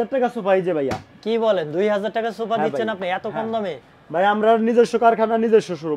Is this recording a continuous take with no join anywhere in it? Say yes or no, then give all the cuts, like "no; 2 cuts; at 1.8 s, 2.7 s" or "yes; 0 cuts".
yes; 0 cuts